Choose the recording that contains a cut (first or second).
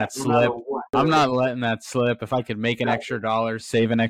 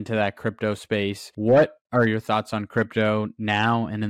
first